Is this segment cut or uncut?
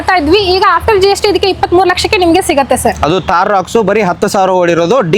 uncut